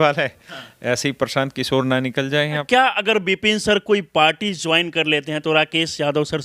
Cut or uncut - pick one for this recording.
cut